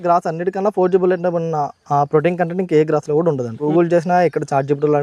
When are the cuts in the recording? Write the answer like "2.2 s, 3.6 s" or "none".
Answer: 3.6 s

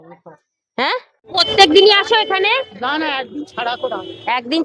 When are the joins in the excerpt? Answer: 1.2 s

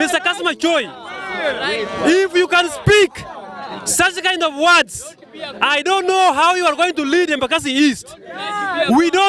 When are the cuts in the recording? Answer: none

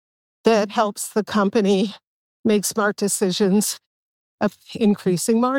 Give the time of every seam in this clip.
4.4 s

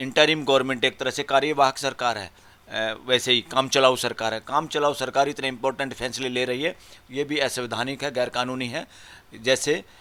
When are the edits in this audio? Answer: none

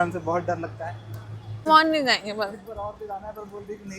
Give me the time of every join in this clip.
1.7 s

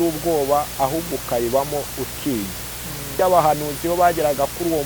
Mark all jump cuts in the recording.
3.1 s

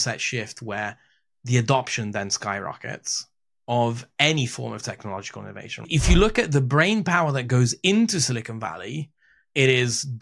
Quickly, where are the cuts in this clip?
5.9 s

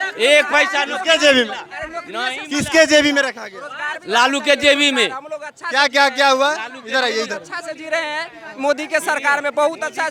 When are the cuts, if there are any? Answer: none

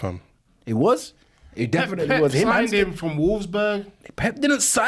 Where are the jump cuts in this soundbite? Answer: none

